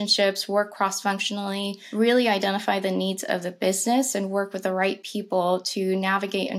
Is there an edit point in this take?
yes; 1 cut; at 1.8 s

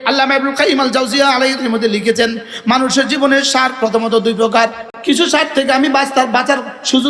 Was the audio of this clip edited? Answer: yes; 2 cuts; at 1.5 s, 4.9 s

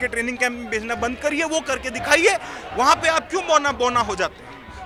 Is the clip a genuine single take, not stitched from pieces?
yes; 0 cuts

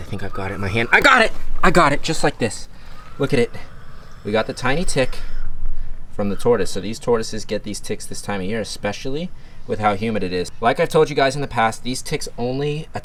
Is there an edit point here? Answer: no; 0 cuts

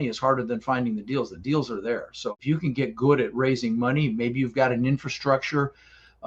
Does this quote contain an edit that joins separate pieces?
yes; 1 cut; at 2.2 s

